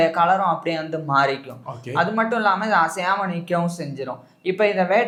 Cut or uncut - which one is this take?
uncut